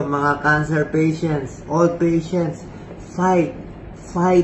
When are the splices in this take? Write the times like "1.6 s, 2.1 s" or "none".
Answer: none